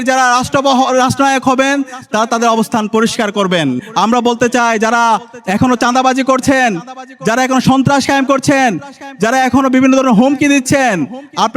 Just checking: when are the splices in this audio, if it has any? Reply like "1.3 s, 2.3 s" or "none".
3.8 s

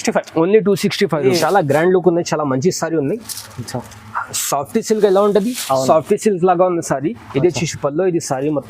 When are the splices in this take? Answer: 1.4 s

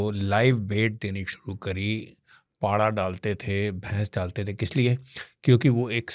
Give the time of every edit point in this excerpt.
none

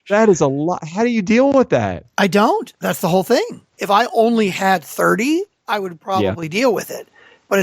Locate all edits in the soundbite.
3.8 s

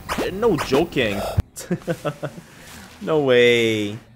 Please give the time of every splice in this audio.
1.5 s

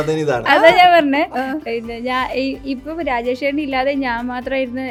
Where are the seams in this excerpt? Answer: none

